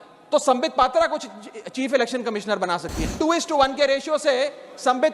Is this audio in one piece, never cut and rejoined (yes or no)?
no